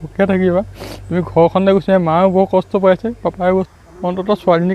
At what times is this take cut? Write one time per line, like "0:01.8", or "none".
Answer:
0:03.7